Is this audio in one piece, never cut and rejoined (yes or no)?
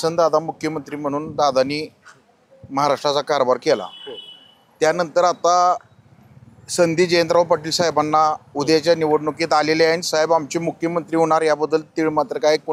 yes